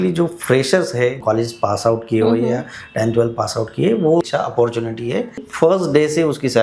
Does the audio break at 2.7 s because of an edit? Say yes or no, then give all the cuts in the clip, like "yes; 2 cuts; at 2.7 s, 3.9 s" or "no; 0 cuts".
no; 3 cuts; at 1.2 s, 4.2 s, 5.4 s